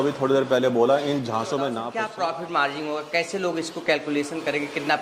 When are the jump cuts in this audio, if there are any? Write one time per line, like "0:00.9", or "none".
0:01.8